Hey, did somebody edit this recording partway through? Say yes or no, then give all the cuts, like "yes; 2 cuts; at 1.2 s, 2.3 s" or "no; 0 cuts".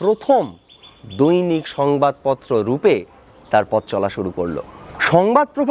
no; 0 cuts